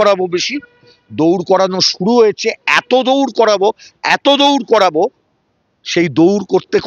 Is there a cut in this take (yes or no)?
no